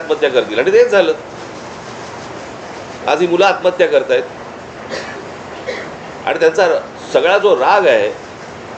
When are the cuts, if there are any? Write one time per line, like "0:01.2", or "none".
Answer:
none